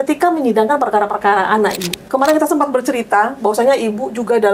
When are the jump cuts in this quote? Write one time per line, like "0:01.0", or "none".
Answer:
0:02.1

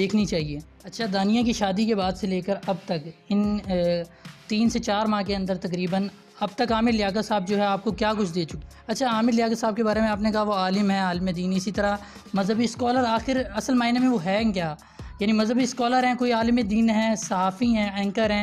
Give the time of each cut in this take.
0:00.9
0:08.6

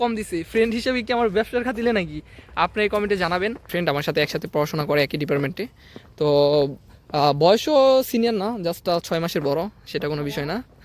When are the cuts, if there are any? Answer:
0:03.7

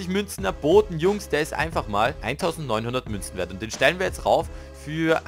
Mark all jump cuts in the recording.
0:02.2

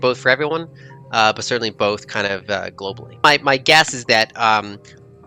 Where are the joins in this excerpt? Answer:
0:03.2

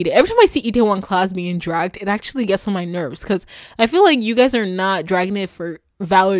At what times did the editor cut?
none

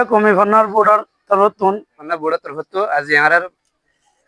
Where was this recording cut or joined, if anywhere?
0:02.1

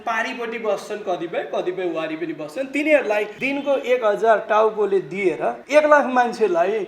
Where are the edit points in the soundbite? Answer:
0:03.4
0:05.6

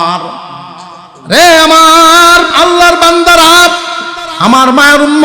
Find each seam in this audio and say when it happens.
0:02.5

